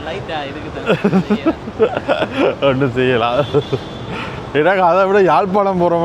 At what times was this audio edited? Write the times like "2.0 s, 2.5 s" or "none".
none